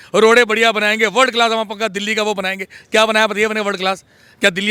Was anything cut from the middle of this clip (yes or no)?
no